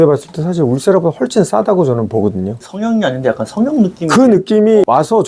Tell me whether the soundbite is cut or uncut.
cut